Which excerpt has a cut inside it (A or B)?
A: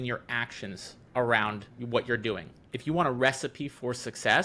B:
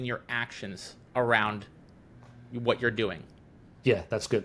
A